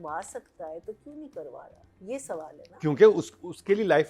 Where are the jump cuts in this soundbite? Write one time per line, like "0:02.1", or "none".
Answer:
none